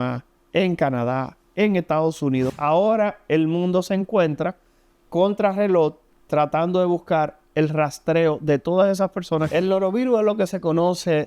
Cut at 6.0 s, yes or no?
no